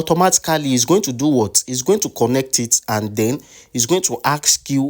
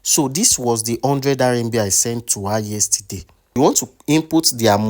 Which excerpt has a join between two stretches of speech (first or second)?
second